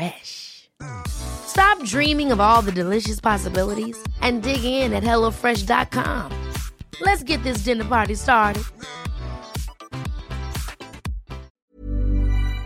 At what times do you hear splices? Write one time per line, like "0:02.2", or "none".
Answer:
0:11.5